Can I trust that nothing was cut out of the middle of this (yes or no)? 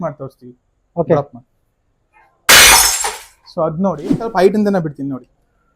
no